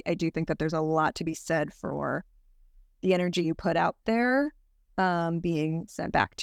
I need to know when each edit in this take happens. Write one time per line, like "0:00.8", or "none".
none